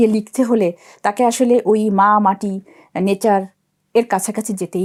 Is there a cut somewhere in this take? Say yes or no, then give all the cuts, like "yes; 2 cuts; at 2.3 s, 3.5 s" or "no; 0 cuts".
no; 0 cuts